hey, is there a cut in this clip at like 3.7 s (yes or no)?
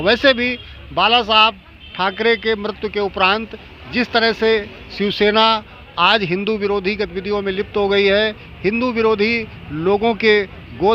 no